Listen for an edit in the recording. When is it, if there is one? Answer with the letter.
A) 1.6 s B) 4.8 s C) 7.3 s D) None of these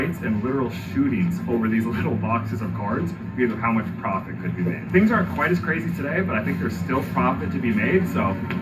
D